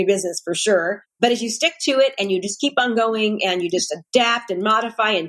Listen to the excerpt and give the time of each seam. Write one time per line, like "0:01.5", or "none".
none